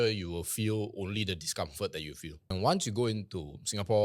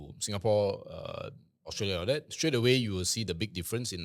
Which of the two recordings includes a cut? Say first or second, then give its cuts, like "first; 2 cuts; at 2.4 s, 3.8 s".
first; 1 cut; at 2.5 s